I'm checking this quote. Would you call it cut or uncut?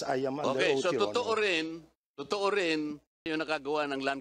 cut